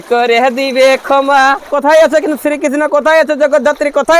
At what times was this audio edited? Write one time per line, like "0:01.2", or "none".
0:01.7